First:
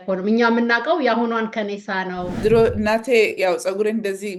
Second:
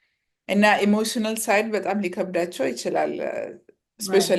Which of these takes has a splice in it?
first; 1 cut; at 2.4 s

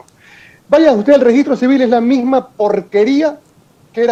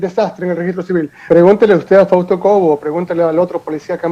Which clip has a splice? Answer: second; 1 cut; at 1.3 s

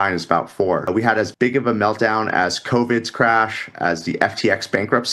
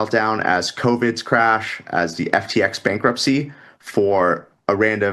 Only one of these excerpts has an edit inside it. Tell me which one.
first; 1 cut; at 1.0 s

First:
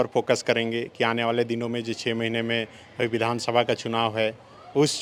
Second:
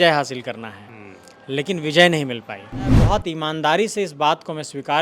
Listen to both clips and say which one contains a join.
second; 1 cut; at 3.0 s

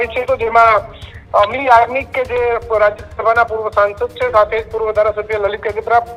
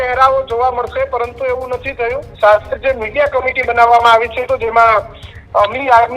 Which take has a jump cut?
second; 1 cut; at 2.3 s

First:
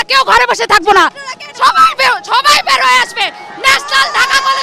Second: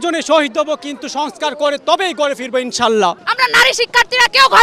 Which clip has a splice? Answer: second; 1 cut; at 3.2 s

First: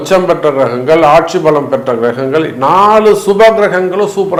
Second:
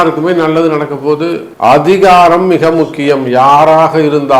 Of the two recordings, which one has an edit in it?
second; 1 cut; at 1.5 s

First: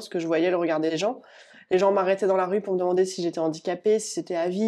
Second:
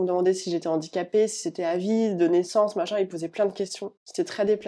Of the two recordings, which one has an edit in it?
first; 1 cut; at 0.9 s

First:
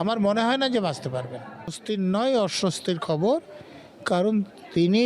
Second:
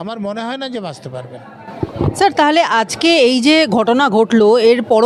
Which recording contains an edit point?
first; 1 cut; at 1.7 s

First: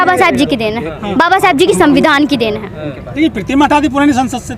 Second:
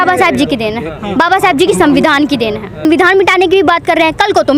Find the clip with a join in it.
second; 1 cut; at 2.8 s

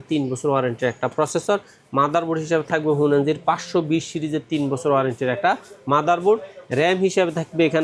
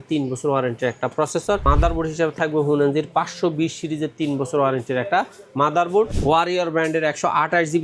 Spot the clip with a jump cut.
second; 2 cuts; at 1.6 s, 6.2 s

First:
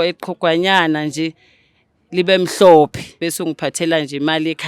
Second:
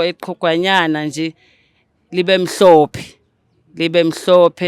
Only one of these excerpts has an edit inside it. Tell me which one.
first; 1 cut; at 3.2 s

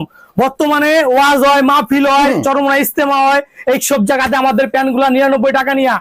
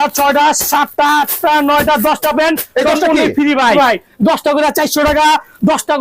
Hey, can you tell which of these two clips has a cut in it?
second; 1 cut; at 3.7 s

